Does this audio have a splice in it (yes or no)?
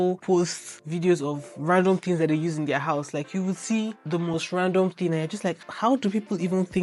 no